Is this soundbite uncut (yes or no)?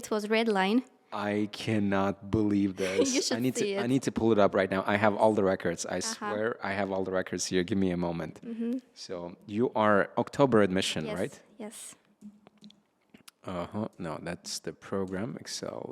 yes